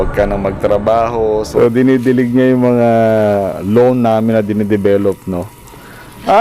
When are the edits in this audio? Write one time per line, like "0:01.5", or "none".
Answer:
0:01.5